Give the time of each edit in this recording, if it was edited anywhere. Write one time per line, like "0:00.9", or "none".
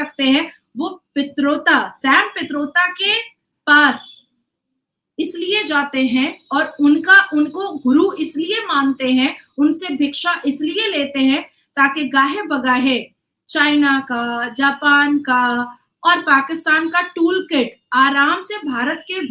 none